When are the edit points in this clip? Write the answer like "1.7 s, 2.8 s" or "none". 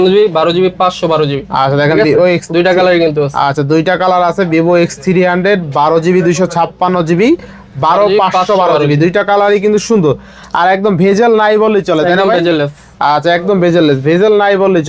none